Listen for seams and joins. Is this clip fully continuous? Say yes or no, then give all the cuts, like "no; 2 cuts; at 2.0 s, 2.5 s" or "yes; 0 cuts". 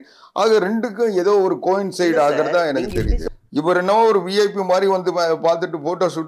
no; 1 cut; at 3.3 s